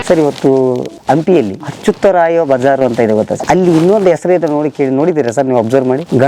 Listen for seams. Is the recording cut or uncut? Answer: cut